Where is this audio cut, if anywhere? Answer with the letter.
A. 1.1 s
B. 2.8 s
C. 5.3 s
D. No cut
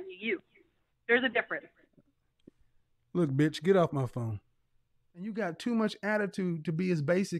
C